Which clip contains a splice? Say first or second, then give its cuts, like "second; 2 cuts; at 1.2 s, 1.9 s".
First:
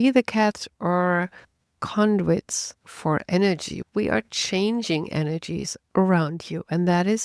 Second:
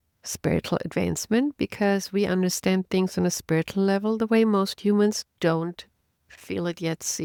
first; 1 cut; at 3.7 s